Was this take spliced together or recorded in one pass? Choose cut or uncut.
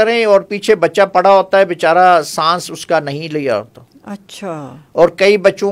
uncut